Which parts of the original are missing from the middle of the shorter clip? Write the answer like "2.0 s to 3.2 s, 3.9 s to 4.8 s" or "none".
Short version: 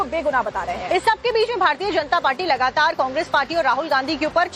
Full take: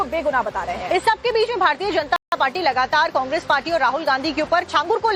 2.2 s to 2.4 s